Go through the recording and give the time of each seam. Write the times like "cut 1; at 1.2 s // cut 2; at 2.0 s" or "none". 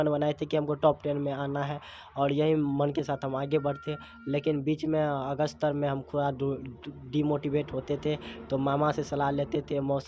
none